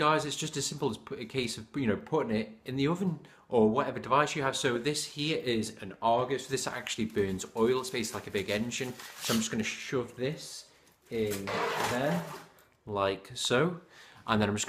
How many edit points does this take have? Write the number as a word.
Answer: zero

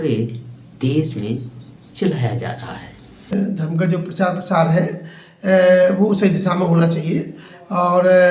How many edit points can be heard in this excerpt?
one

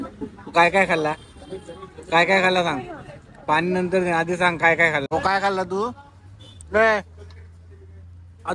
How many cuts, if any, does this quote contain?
one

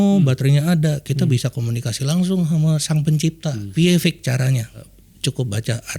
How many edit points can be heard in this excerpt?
two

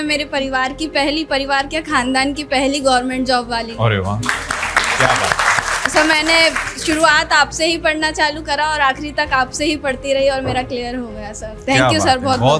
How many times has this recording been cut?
zero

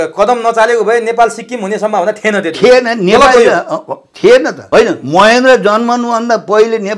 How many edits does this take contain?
one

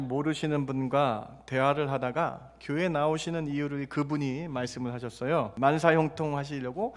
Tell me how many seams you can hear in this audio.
one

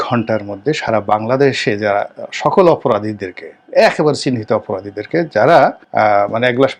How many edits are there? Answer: one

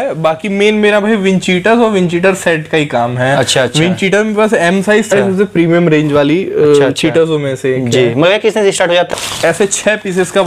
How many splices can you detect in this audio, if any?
two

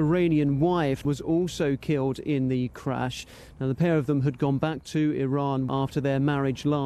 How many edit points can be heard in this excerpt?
two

